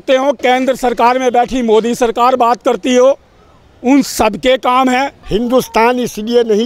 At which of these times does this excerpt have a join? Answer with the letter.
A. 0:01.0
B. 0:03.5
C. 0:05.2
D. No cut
C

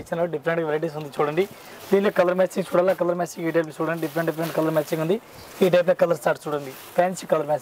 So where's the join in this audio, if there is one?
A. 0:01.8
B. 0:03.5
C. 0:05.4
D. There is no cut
D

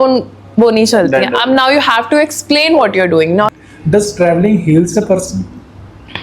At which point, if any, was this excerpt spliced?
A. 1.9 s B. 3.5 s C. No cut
B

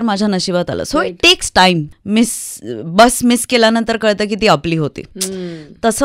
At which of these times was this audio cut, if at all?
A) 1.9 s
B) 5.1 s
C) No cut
A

